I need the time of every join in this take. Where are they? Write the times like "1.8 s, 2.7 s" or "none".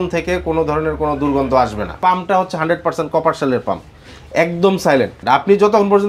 1.9 s, 5.2 s